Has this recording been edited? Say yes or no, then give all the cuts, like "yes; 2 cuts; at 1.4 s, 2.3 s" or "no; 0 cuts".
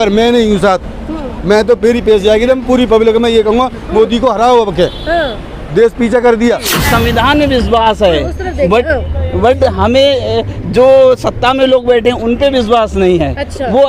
yes; 1 cut; at 6.7 s